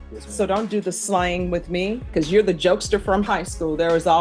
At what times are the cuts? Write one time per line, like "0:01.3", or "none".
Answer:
0:02.1